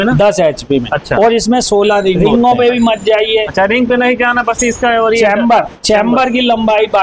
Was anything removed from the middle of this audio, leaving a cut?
yes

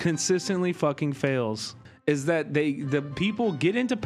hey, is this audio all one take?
no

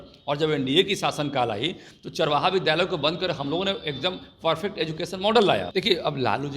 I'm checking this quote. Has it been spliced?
yes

